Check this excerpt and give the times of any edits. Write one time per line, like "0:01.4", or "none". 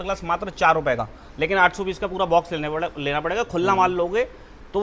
none